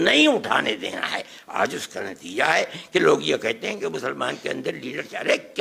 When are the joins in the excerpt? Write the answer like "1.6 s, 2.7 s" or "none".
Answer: none